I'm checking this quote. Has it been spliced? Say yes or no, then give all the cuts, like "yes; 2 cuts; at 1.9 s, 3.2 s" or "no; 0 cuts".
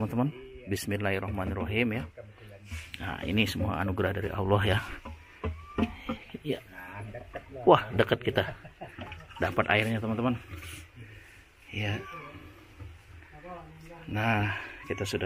no; 0 cuts